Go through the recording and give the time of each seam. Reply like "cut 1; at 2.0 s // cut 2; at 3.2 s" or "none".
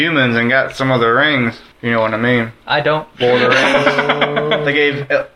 cut 1; at 1.7 s // cut 2; at 2.6 s